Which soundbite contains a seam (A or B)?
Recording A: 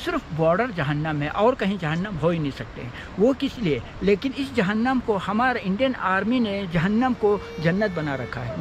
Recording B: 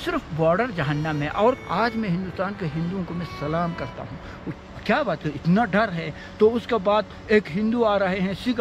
B